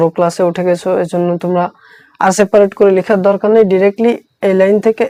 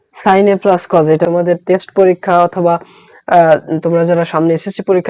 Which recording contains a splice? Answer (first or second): second